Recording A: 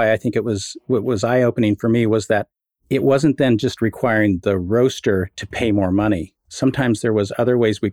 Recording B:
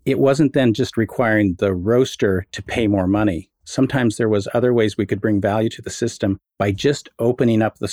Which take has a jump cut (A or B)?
B